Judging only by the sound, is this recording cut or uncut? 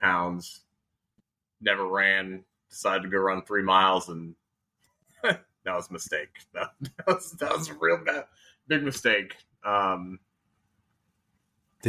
uncut